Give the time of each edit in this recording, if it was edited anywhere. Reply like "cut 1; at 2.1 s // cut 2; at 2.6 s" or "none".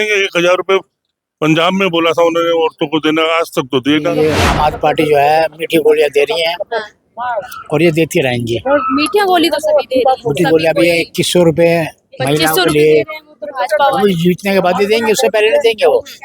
cut 1; at 4.1 s